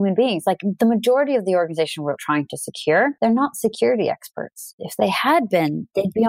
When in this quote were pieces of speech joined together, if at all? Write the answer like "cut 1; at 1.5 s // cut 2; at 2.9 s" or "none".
cut 1; at 3.1 s // cut 2; at 4.7 s